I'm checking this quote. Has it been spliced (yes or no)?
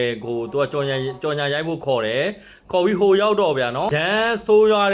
yes